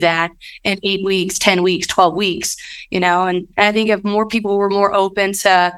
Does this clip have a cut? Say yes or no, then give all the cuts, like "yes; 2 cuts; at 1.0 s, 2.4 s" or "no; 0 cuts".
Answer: yes; 1 cut; at 3.5 s